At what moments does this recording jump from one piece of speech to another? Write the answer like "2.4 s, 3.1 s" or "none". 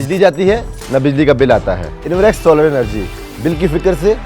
1.9 s

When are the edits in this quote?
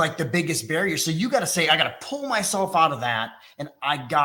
none

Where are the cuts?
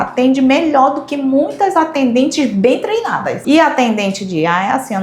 3.3 s

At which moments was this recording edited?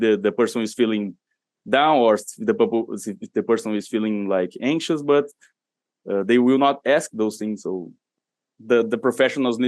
8.1 s

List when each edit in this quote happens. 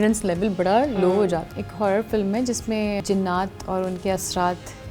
1.6 s, 3.0 s

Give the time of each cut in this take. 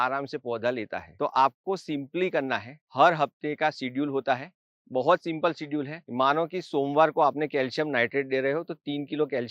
none

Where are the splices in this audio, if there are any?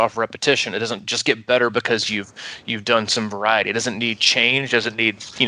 1.1 s

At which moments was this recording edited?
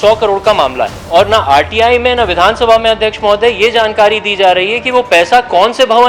0.9 s

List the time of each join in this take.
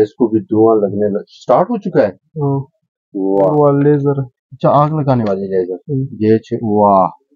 3.5 s

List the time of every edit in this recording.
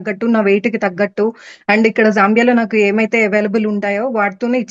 none

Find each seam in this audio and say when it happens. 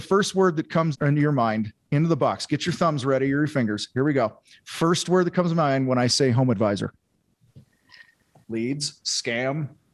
0.9 s, 8.4 s

